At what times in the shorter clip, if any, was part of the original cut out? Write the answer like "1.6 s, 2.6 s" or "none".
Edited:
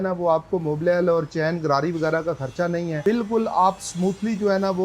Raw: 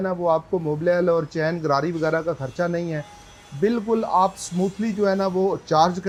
3.0 s